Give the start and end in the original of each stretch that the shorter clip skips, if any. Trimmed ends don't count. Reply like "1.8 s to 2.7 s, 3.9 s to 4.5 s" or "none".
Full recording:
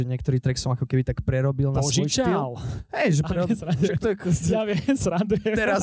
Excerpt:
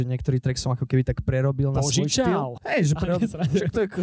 2.6 s to 2.8 s

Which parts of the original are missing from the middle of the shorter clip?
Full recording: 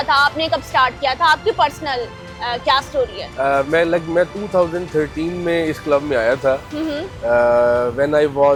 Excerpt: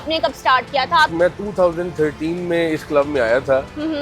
1.4 s to 4.1 s

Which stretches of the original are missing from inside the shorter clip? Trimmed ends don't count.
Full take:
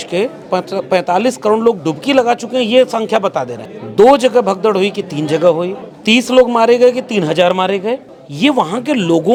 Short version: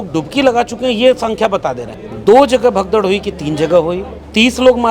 none

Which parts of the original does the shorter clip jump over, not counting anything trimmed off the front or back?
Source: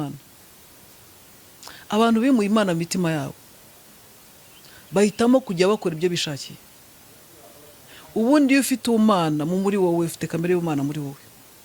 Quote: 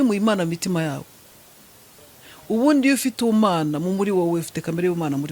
4.3 s to 7.6 s

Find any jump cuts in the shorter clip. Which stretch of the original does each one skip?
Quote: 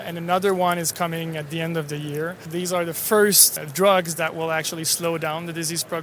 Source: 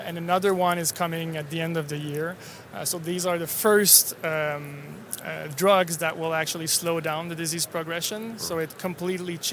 2.4 s to 3.0 s, 4.1 s to 5.4 s

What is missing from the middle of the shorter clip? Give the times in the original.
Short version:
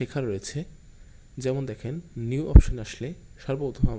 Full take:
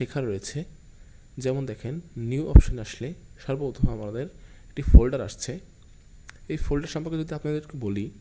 none

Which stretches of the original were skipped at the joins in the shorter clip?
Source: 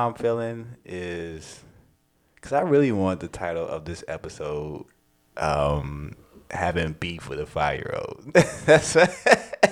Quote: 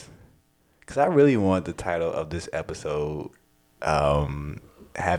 none

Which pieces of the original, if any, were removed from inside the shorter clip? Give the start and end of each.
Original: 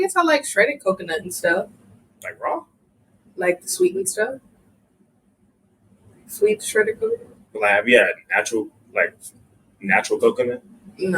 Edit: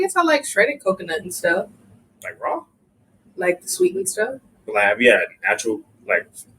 4.5 s to 7.4 s

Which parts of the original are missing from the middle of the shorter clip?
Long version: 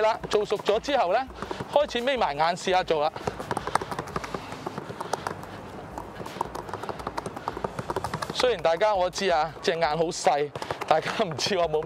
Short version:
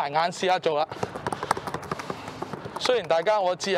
5.0 s to 8.3 s

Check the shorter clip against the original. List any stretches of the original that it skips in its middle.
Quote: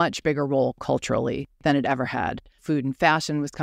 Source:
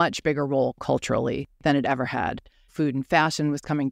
2.5 s to 2.6 s

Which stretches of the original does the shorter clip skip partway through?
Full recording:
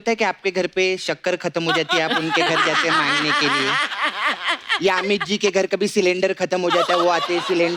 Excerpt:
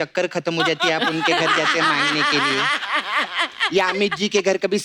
none

